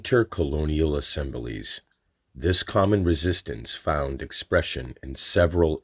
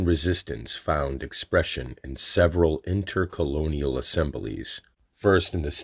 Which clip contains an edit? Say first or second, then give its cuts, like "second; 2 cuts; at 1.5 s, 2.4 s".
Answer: first; 1 cut; at 1.0 s